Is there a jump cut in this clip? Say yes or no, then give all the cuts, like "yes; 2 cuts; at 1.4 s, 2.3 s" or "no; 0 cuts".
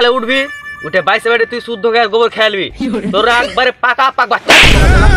no; 0 cuts